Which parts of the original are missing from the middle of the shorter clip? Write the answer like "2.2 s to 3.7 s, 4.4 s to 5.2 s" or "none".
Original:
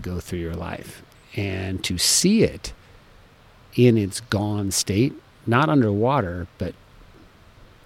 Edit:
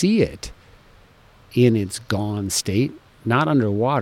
none